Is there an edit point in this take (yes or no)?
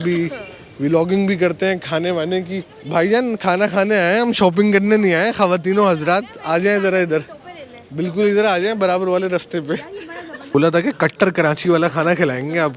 yes